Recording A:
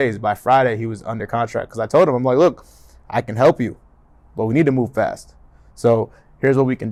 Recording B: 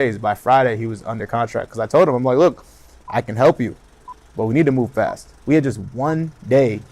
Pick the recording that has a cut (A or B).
B